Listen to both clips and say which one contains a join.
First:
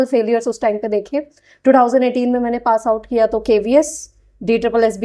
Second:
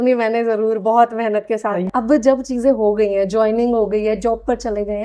second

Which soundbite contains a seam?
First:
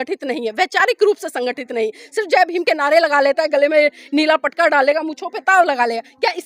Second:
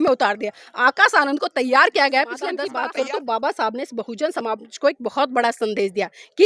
second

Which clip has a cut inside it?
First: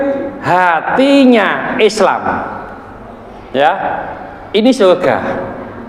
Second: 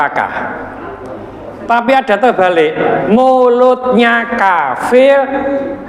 second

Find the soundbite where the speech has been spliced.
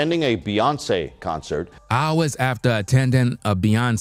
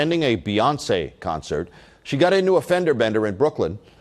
second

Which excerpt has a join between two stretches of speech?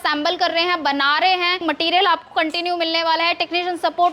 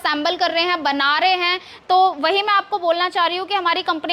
first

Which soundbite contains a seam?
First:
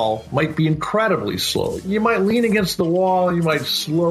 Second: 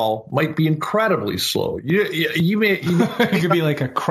first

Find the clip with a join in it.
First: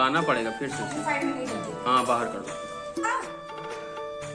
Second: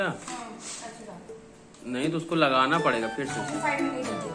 first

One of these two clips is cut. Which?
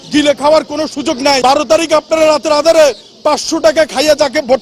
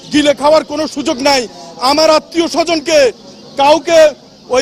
first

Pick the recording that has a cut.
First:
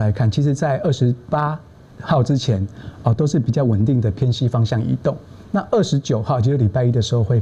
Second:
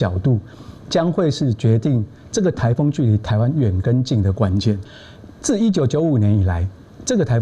second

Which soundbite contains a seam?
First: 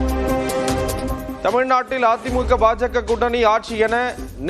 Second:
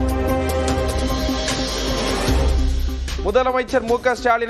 first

